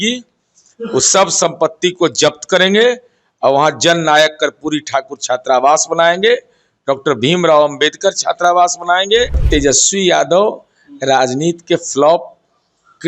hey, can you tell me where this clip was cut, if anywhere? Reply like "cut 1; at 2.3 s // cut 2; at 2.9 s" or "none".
cut 1; at 9.4 s